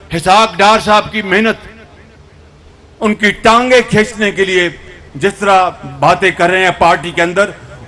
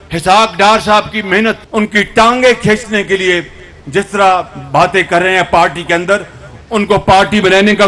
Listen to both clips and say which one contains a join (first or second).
second